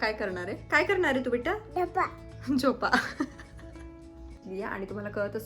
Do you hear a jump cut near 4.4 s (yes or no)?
yes